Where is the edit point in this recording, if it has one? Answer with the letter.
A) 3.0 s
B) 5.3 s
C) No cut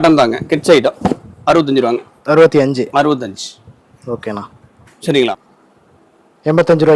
B